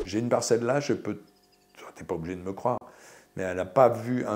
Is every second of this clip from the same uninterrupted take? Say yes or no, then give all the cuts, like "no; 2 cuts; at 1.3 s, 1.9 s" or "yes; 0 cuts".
yes; 0 cuts